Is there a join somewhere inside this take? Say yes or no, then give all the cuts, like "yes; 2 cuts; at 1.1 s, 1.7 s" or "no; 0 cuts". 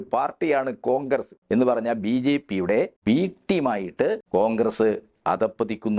yes; 3 cuts; at 1.3 s, 2.9 s, 4.2 s